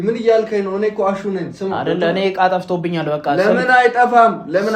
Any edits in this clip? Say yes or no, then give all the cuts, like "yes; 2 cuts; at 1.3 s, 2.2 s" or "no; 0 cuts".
yes; 1 cut; at 1.8 s